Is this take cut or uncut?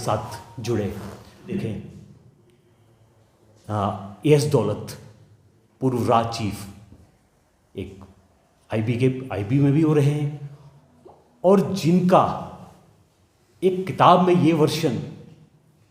cut